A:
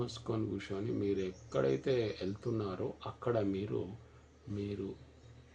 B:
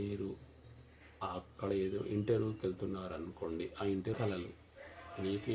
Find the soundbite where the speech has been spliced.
B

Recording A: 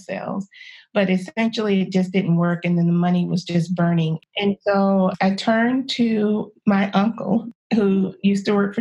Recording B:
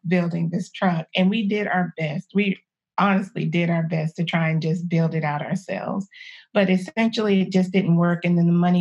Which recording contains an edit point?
A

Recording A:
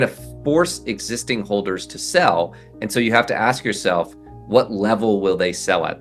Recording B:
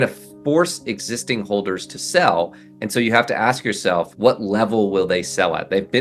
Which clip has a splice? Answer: B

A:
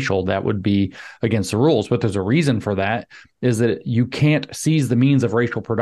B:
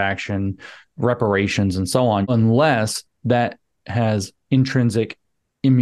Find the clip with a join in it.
B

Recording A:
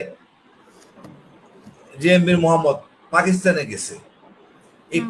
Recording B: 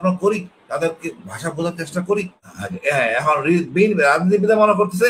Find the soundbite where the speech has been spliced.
B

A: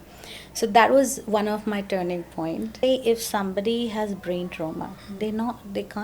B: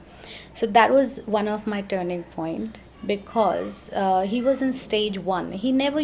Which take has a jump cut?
A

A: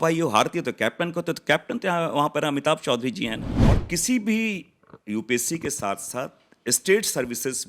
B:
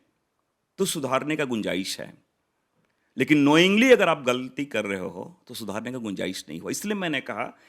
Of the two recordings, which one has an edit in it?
A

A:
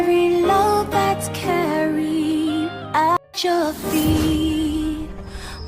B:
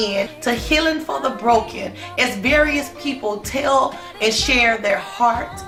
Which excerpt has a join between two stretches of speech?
A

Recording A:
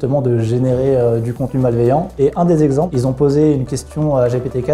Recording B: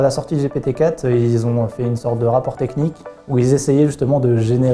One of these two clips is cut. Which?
A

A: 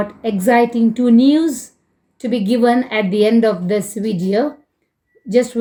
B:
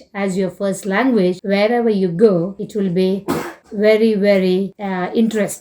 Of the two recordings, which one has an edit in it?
B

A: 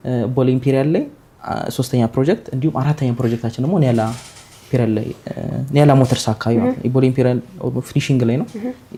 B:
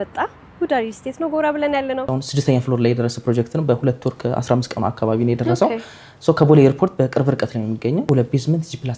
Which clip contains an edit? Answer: B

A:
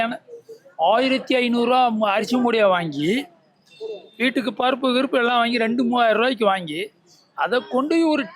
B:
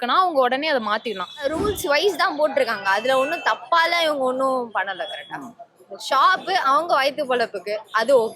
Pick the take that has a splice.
B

